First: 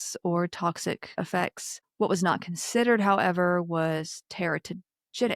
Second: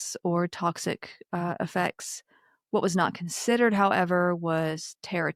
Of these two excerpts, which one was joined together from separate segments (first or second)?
first